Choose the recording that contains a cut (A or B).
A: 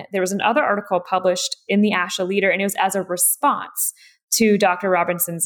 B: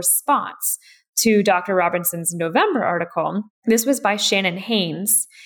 B